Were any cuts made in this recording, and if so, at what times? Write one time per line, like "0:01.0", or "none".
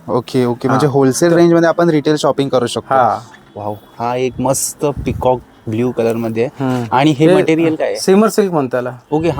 none